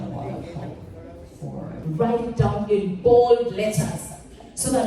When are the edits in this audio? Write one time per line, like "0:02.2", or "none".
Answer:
0:01.7